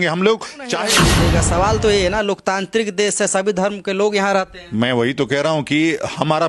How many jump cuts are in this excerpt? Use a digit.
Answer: 1